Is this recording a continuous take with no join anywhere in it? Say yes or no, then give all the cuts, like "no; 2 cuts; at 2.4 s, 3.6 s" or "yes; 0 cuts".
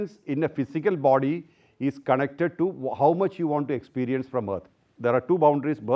yes; 0 cuts